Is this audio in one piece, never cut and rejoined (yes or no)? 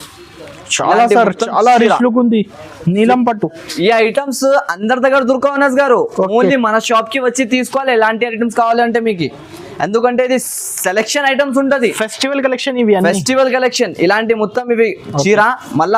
yes